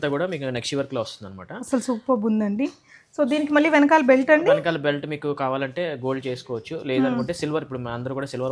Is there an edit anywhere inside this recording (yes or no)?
no